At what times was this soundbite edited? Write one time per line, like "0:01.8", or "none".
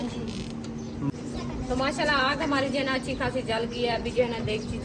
0:01.1